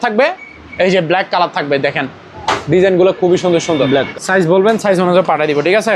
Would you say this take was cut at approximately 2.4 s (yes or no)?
no